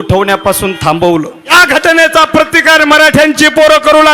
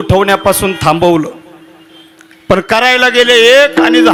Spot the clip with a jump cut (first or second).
first